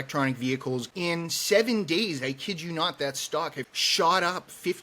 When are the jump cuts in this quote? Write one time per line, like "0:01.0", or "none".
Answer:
0:00.8
0:03.7

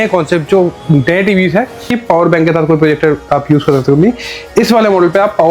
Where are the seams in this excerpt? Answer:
0:02.0

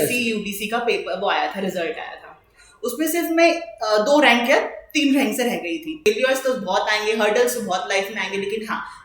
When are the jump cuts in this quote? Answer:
0:06.1

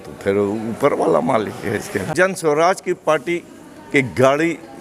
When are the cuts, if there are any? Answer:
0:02.1

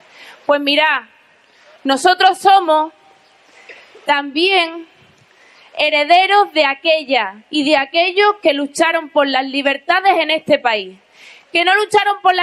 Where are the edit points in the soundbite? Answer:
0:02.0

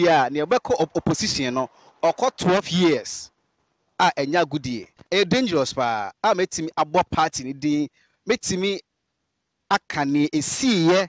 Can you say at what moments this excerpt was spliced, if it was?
0:04.9

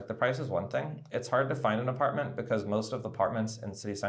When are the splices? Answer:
none

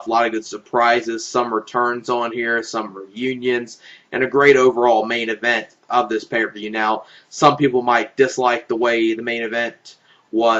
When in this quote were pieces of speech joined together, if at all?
none

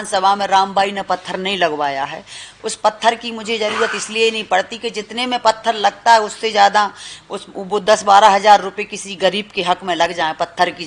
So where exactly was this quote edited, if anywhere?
none

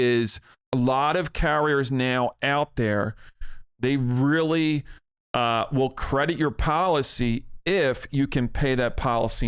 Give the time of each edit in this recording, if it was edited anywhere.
none

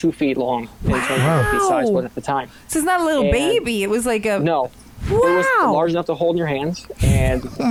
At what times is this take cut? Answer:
none

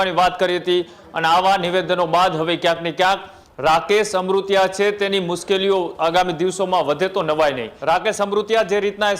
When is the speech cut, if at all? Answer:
0:07.7

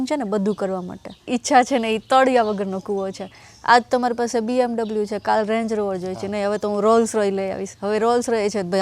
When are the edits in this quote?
0:01.1

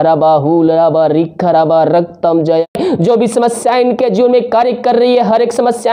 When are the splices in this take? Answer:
0:02.7

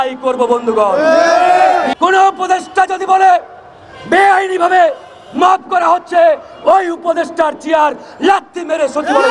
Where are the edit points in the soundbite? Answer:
0:01.9

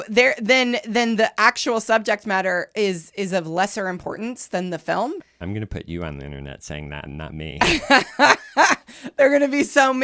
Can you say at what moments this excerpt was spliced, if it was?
0:05.2

